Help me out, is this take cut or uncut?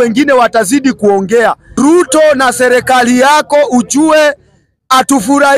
cut